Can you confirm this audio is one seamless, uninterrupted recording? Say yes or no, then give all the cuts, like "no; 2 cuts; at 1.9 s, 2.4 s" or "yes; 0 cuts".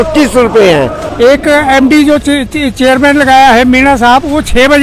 no; 1 cut; at 1.0 s